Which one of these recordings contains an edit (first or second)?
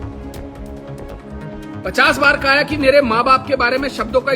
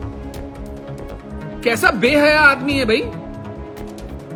first